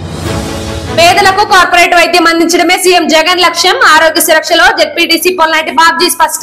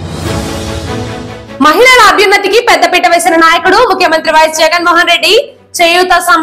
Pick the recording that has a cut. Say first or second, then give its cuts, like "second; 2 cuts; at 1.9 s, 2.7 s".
second; 1 cut; at 1.0 s